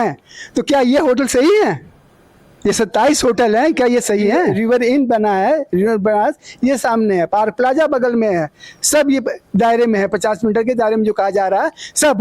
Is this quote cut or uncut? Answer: cut